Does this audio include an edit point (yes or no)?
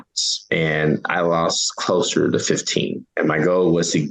yes